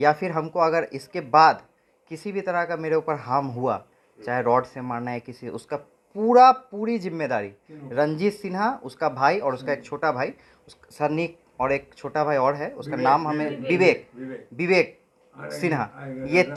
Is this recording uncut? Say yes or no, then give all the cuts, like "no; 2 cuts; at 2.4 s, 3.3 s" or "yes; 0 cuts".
yes; 0 cuts